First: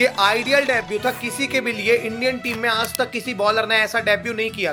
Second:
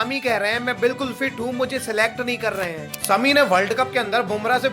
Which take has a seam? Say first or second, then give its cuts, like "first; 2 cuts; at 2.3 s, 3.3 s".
second; 1 cut; at 2.9 s